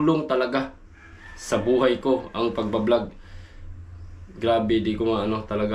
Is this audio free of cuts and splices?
yes; 0 cuts

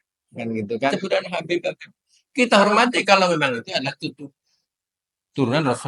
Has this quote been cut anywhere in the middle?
yes; 1 cut; at 0.9 s

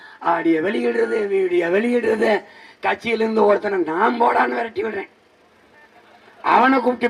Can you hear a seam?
no; 0 cuts

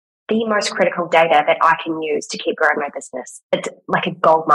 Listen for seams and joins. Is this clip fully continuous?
no; 1 cut; at 3.5 s

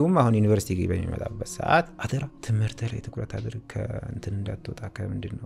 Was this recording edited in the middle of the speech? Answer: yes; 1 cut; at 2.4 s

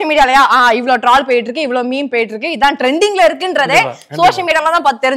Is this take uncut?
yes; 0 cuts

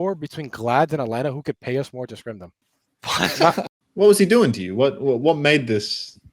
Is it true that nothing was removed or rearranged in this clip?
no; 1 cut; at 3.7 s

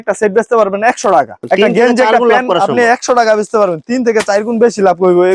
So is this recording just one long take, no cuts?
yes; 0 cuts

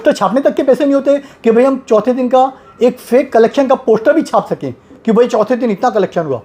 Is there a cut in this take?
no; 0 cuts

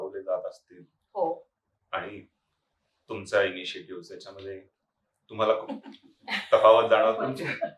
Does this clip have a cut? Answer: no; 0 cuts

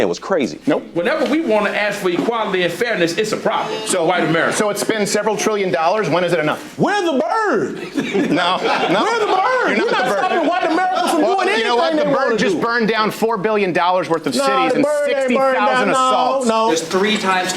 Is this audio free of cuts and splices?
no; 3 cuts; at 1.5 s, 8.3 s, 16.5 s

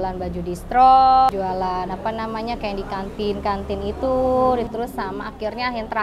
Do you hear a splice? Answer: yes; 2 cuts; at 1.3 s, 4.7 s

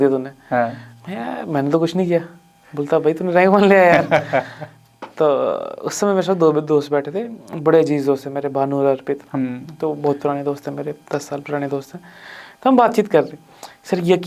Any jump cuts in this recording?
no; 0 cuts

